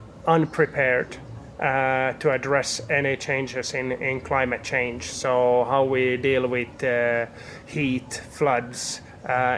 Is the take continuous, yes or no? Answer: yes